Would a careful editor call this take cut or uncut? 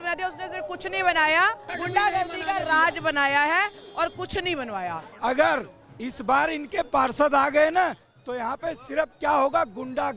cut